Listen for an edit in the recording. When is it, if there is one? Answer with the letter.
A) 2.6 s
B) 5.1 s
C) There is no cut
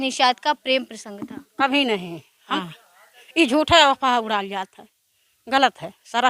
A